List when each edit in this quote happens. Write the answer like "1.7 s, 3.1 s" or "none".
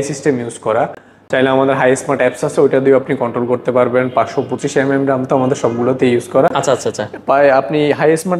none